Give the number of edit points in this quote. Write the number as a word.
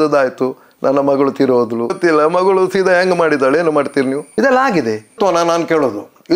three